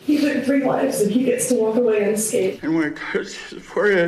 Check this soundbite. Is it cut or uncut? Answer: cut